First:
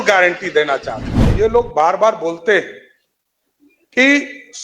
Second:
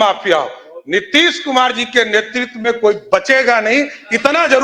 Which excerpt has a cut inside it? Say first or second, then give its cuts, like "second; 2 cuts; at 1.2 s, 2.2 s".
first; 1 cut; at 1.2 s